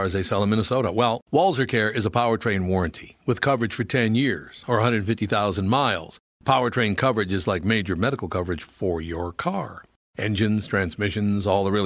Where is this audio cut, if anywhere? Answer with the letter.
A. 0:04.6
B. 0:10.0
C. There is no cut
C